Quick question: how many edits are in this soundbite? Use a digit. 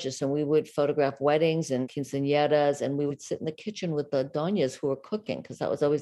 2